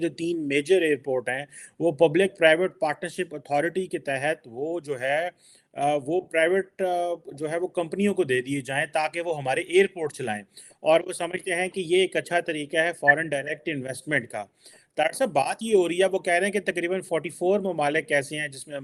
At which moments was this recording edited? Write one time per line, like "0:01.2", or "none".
none